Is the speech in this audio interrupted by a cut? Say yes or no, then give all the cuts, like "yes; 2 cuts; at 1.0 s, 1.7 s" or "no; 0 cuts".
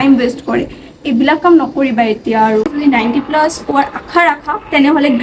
yes; 1 cut; at 2.7 s